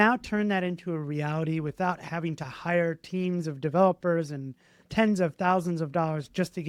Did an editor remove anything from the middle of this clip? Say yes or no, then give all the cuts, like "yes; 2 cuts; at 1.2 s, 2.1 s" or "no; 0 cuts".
no; 0 cuts